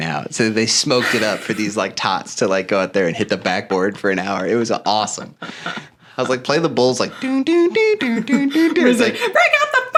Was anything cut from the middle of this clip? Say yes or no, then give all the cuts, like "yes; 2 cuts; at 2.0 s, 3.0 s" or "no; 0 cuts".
no; 0 cuts